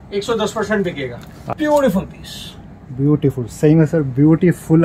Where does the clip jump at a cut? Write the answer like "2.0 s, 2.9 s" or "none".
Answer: 1.5 s